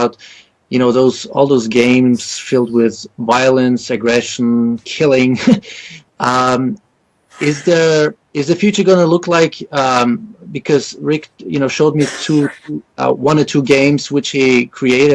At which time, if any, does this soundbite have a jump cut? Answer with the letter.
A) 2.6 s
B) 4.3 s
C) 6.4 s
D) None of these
A